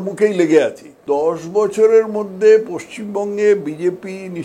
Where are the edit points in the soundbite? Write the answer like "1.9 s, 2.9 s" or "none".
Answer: 1.0 s